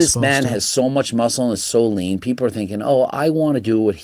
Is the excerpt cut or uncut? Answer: uncut